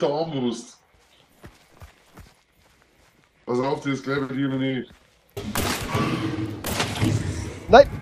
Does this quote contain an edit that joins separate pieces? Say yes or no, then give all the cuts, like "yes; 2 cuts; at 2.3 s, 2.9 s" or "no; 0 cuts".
yes; 1 cut; at 5.4 s